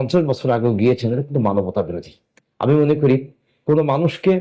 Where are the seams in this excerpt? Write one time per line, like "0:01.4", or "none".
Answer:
none